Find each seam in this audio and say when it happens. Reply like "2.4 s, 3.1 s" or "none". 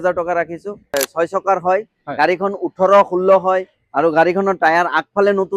1.1 s